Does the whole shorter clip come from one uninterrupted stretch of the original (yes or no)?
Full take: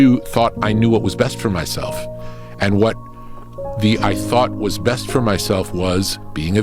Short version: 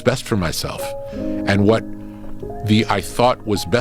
yes